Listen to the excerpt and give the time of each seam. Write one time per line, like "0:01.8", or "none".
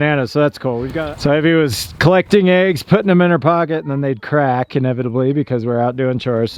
0:00.9